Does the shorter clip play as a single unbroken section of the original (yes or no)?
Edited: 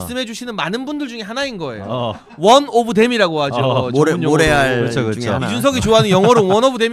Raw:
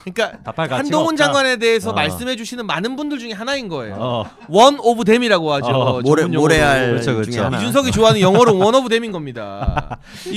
yes